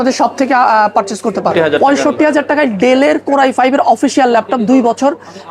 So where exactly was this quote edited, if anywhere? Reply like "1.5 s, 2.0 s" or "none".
1.7 s

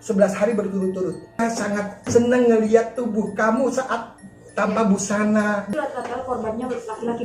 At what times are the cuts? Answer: 1.4 s, 5.7 s

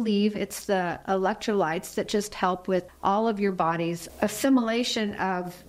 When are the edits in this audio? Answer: 1.0 s

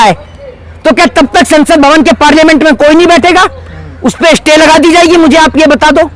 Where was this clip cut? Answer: none

